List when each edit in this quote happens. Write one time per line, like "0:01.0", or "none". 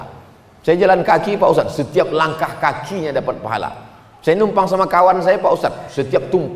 none

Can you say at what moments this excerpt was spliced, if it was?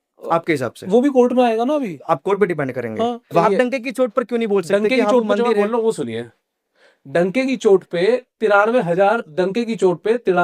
0:03.4

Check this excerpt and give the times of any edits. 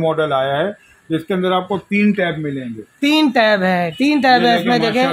none

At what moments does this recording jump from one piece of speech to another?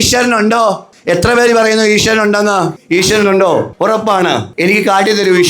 0:00.9
0:02.8
0:04.2

